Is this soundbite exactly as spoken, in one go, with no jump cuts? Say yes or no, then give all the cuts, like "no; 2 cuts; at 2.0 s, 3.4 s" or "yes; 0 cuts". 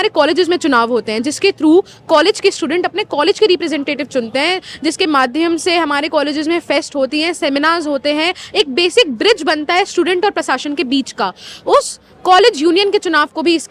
yes; 0 cuts